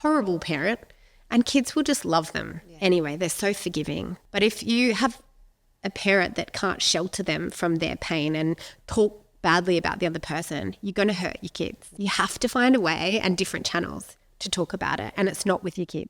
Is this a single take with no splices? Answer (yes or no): no